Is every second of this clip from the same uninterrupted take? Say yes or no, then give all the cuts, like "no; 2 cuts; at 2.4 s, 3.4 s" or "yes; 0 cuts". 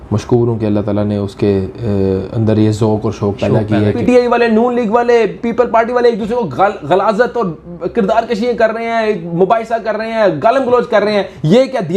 no; 1 cut; at 4.0 s